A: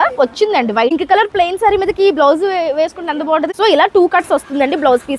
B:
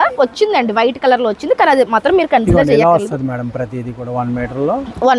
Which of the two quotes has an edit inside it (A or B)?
A